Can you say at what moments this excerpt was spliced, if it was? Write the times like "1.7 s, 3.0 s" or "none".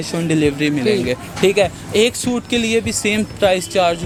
none